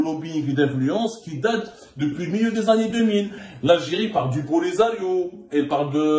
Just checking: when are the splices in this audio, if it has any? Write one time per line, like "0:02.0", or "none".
0:03.4